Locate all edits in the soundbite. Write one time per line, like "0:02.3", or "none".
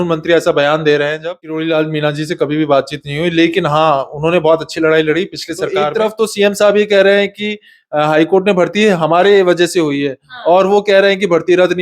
0:01.5
0:05.9